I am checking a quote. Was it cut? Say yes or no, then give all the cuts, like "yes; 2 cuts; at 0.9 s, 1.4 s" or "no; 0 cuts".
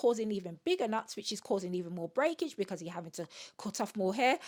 no; 0 cuts